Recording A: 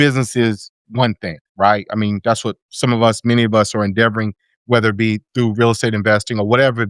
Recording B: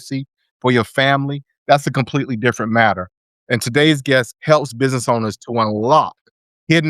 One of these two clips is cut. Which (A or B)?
B